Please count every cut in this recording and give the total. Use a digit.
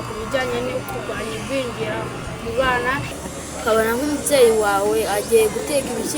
1